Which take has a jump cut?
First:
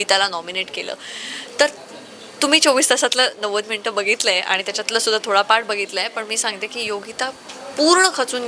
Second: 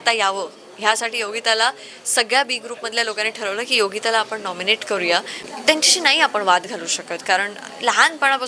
second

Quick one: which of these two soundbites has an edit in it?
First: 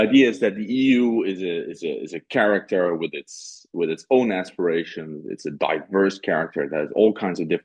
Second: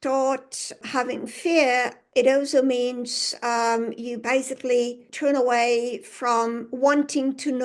second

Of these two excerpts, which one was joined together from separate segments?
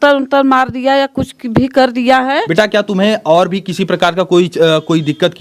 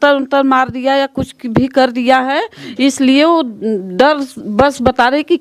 first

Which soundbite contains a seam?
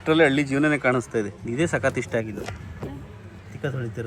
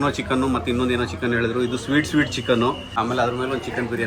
first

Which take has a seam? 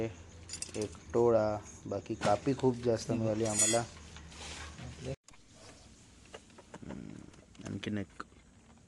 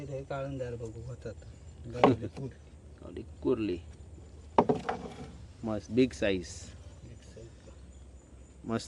first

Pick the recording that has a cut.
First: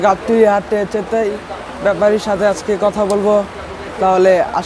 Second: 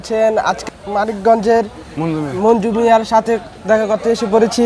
second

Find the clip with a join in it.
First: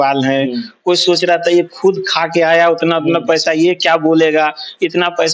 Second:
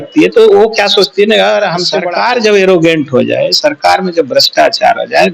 second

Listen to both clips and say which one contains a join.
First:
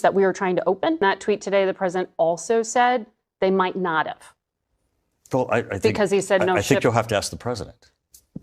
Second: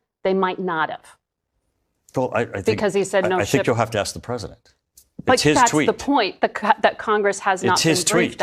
first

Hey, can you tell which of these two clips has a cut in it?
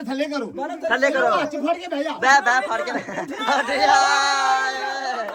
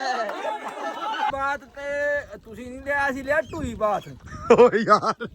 second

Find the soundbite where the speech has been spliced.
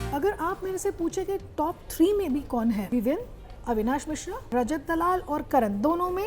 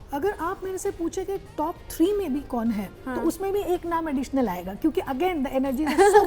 first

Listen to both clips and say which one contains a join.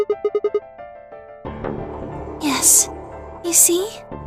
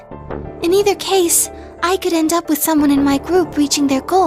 first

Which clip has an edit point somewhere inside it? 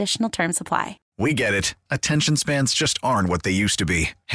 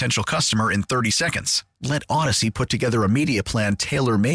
first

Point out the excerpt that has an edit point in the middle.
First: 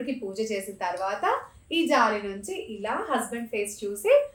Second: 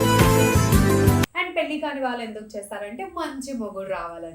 second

